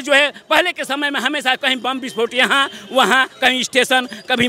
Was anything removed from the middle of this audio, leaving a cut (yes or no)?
no